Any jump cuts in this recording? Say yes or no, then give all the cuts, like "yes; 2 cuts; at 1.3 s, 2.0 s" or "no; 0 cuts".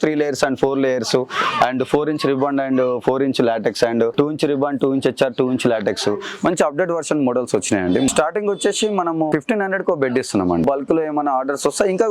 yes; 4 cuts; at 4.1 s, 8.1 s, 9.3 s, 10.6 s